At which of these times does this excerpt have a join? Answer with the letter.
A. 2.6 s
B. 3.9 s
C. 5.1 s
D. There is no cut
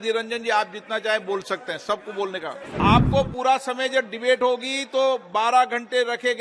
A